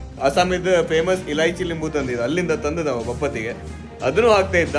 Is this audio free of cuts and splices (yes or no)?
yes